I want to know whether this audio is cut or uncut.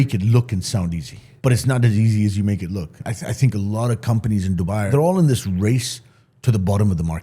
cut